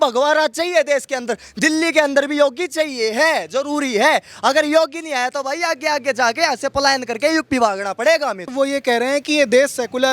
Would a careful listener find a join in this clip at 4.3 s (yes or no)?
no